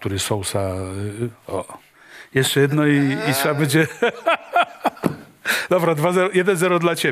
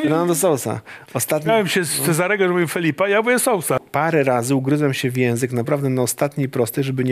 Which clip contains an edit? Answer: second; 1 cut; at 3.8 s

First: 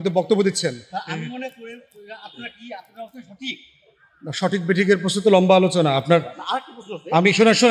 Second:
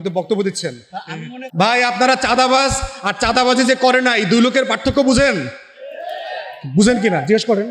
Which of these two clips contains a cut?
second; 1 cut; at 1.4 s

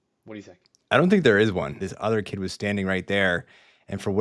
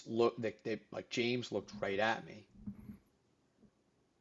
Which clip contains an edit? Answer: first; 1 cut; at 1.8 s

